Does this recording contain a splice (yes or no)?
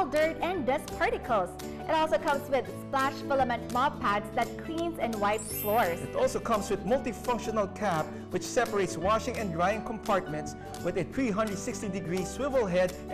no